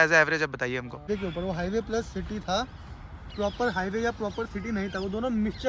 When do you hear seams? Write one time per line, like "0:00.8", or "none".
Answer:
0:01.1